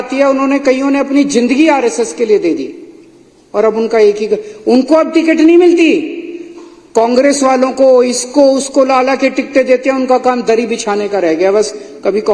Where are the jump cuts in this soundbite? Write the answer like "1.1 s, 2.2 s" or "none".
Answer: none